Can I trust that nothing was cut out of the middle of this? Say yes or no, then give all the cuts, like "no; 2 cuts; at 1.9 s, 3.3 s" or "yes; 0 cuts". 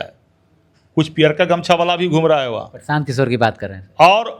yes; 0 cuts